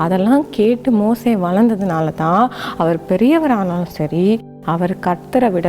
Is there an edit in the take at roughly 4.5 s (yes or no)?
yes